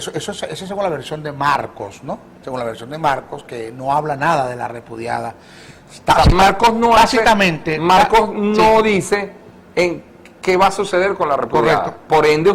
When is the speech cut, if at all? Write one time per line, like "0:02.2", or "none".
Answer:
none